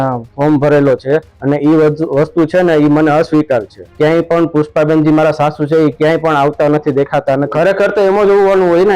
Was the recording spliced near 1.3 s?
yes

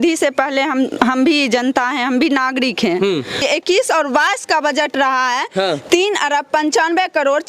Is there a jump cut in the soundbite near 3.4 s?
yes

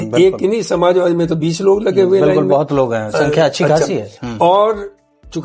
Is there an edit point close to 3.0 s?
no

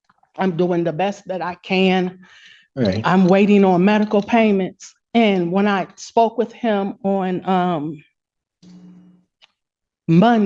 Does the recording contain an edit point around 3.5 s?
no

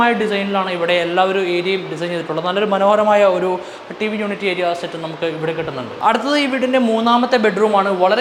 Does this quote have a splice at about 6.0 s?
no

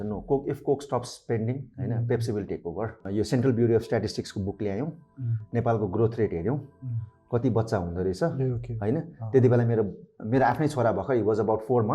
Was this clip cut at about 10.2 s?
no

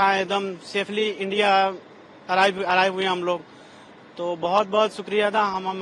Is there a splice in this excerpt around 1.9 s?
no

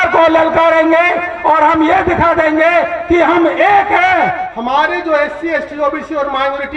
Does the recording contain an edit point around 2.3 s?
no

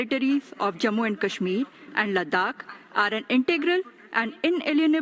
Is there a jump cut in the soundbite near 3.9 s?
no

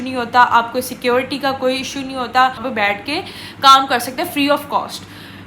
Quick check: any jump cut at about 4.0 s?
no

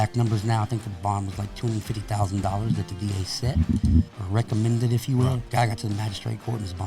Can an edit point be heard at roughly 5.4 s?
yes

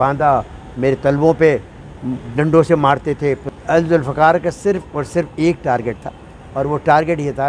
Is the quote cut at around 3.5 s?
yes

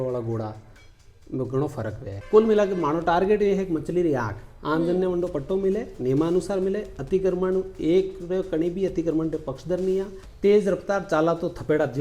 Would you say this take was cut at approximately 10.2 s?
yes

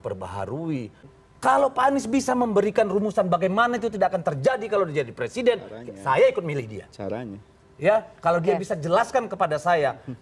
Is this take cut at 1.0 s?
yes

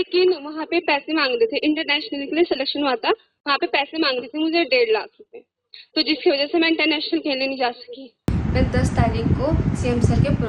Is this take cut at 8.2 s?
yes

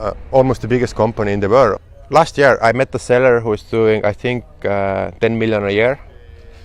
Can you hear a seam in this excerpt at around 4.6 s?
no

